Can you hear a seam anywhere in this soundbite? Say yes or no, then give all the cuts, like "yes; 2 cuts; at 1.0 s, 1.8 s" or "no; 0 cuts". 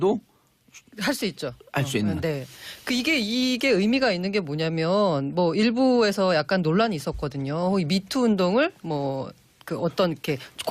yes; 1 cut; at 6.8 s